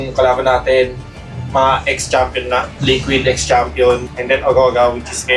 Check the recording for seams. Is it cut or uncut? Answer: cut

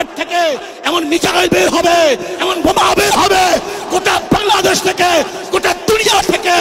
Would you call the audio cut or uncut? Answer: uncut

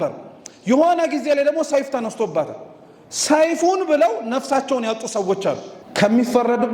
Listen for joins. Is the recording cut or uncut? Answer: cut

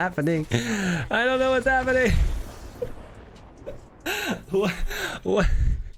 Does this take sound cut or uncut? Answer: uncut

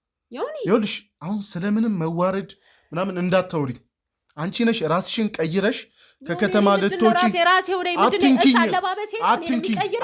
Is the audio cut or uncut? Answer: uncut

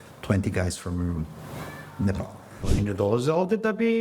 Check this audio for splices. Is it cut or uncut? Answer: cut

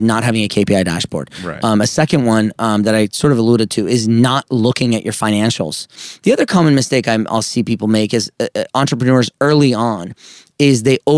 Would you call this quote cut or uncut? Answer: cut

